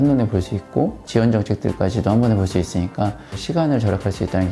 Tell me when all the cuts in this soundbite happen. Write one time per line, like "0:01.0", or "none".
0:03.4